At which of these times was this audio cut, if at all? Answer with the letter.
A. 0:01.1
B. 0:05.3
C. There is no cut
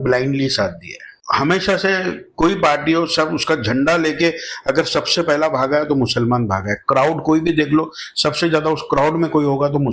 A